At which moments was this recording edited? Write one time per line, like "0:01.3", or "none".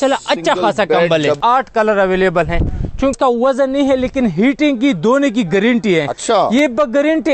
0:01.4
0:03.1

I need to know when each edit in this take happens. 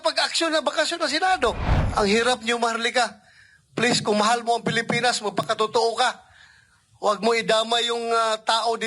0:01.7

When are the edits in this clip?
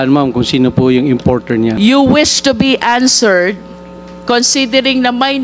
0:01.8

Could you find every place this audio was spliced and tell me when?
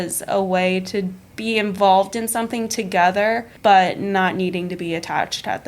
0:01.2
0:03.5

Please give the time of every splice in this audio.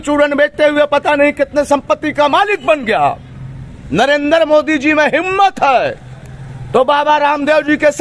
none

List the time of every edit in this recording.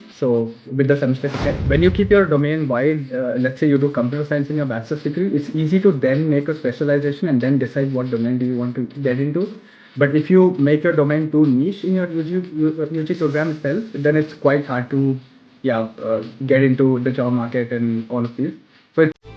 0:01.6

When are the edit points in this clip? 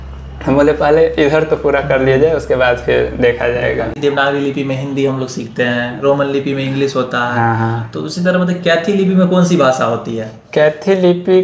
0:03.9

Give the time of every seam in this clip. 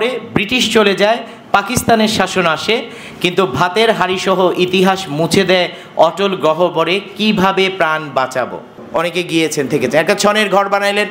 0:08.8

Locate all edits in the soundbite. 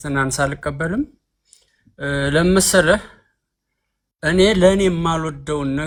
none

